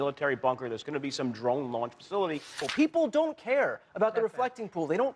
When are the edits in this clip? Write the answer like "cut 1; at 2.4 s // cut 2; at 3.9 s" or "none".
cut 1; at 2.6 s